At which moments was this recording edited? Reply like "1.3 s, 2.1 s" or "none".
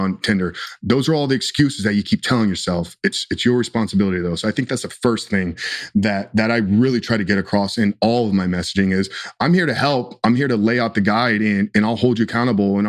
none